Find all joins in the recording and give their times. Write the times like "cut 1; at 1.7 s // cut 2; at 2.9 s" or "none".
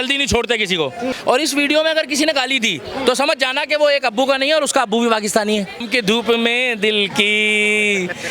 cut 1; at 1.1 s // cut 2; at 5.8 s